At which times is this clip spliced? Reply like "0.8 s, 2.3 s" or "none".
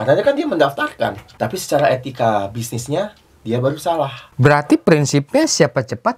1.2 s, 4.2 s